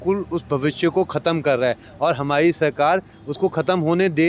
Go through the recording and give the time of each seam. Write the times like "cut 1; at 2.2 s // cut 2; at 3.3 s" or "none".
none